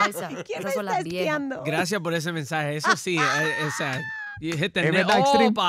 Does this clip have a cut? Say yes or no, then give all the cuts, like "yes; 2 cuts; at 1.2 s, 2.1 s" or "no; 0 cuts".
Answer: no; 0 cuts